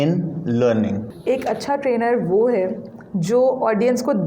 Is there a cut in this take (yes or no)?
yes